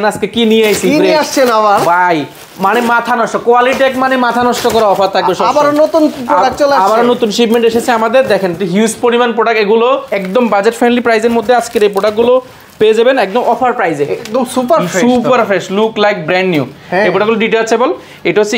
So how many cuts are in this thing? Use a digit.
2